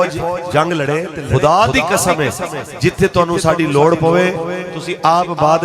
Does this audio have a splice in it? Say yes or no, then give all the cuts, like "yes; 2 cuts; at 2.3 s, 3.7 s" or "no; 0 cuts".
yes; 1 cut; at 1.2 s